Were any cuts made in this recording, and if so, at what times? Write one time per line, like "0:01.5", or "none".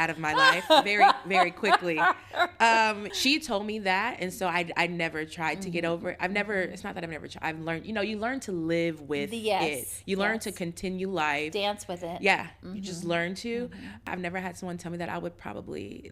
0:03.1
0:14.0